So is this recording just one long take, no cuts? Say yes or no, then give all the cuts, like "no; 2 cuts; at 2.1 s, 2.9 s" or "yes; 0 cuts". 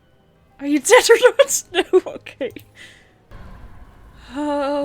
no; 1 cut; at 3.3 s